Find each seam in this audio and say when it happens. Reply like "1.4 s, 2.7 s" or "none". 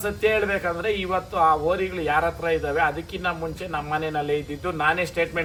none